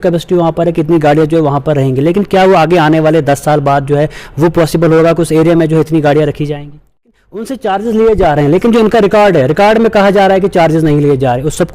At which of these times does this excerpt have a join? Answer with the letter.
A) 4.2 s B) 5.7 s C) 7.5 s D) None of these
C